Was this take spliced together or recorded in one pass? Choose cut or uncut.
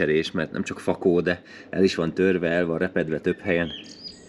uncut